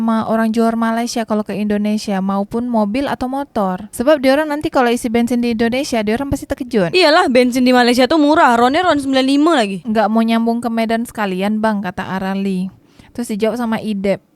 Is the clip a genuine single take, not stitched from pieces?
no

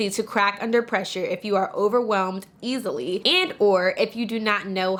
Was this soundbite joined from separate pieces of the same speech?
no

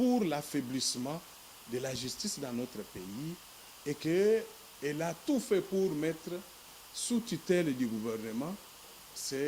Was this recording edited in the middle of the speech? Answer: no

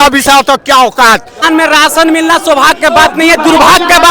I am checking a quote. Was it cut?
yes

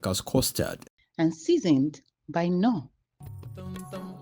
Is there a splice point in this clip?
no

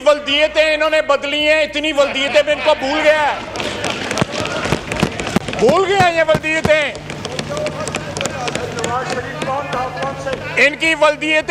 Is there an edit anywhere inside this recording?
no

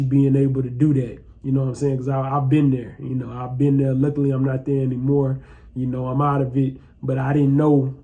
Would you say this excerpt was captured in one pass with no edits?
yes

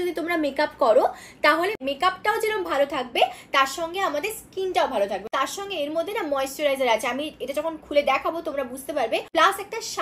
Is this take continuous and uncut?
yes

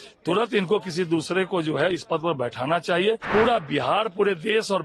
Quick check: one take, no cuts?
no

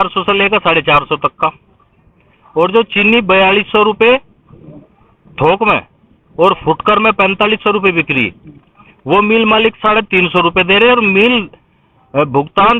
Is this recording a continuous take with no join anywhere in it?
yes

